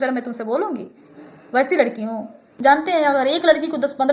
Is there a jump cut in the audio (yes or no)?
yes